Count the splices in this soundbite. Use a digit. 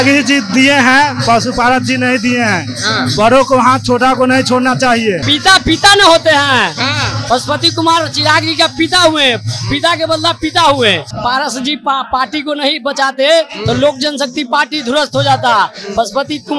2